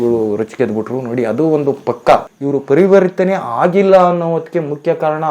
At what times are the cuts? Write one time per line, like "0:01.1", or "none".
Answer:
0:02.3